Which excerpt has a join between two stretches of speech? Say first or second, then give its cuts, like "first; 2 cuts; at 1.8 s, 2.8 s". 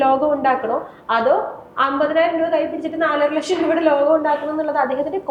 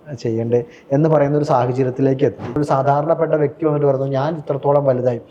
second; 1 cut; at 2.6 s